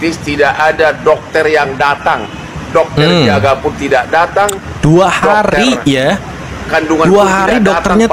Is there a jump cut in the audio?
no; 0 cuts

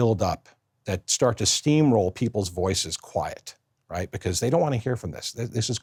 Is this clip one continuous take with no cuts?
yes; 0 cuts

